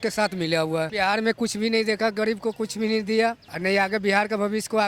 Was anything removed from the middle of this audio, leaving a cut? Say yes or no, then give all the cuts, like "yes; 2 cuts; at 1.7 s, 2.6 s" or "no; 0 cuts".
yes; 2 cuts; at 0.9 s, 3.5 s